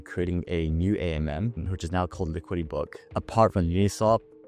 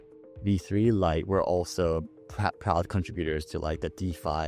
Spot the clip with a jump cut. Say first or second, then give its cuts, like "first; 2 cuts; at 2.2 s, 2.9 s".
first; 1 cut; at 3.0 s